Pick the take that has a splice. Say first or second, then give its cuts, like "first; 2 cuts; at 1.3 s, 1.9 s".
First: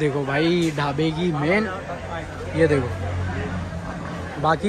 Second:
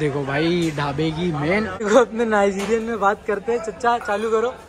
second; 1 cut; at 1.9 s